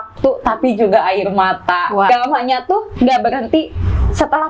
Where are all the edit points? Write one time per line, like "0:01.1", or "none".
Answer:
0:02.1